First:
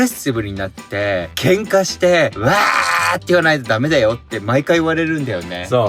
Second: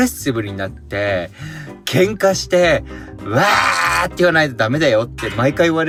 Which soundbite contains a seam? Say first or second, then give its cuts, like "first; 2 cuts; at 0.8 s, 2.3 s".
first; 2 cuts; at 1.3 s, 2.4 s